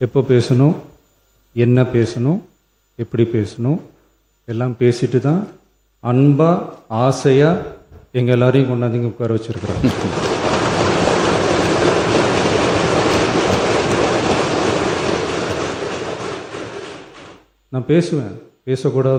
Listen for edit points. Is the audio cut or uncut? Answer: uncut